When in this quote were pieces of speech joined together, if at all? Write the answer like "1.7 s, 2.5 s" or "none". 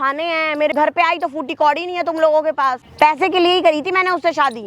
0.7 s, 2.8 s